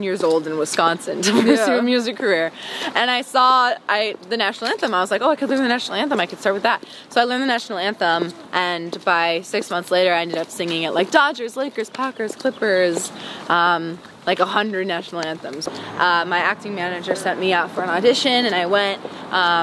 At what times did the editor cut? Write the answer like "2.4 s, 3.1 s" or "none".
15.6 s